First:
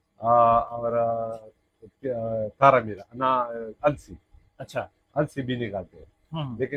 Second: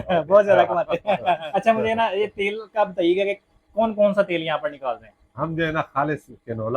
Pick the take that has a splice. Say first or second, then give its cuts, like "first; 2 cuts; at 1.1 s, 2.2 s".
second; 1 cut; at 1.4 s